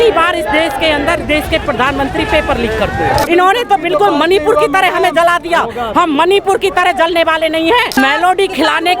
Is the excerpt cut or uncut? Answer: cut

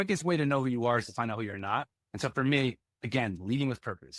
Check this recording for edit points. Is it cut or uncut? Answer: cut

